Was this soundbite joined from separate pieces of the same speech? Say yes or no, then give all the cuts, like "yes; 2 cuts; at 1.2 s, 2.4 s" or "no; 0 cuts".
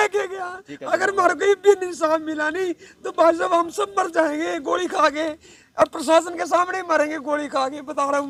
no; 0 cuts